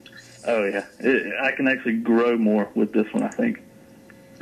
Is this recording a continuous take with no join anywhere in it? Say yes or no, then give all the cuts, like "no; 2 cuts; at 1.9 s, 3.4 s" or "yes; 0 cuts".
yes; 0 cuts